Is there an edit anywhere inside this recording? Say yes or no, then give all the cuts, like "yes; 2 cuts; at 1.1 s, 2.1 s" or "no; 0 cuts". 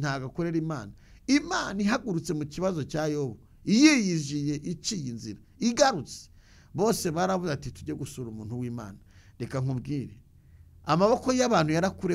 no; 0 cuts